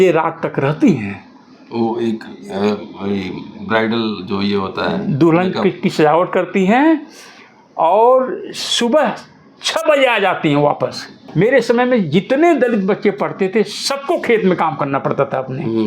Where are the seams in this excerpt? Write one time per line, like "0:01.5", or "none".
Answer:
0:11.2